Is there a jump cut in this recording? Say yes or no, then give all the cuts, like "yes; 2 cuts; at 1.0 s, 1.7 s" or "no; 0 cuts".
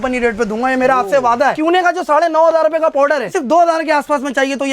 yes; 2 cuts; at 1.6 s, 3.3 s